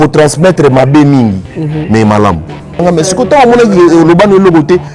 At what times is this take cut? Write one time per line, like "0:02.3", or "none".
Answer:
0:02.8